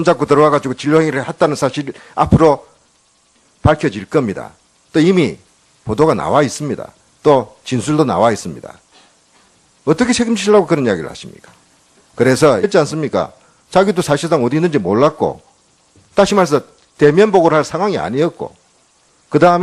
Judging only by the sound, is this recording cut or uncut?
uncut